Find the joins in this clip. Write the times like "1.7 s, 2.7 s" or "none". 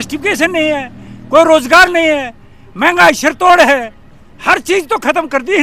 none